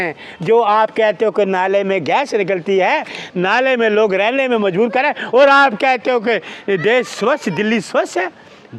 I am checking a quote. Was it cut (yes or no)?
no